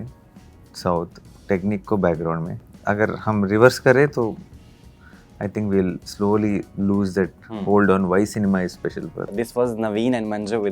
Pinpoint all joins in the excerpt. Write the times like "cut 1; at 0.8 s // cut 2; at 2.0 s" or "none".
cut 1; at 2.7 s // cut 2; at 9.3 s